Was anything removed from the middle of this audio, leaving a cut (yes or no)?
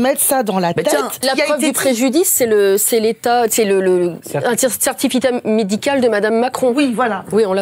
yes